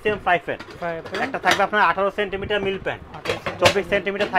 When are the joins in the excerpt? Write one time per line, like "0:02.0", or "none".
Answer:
none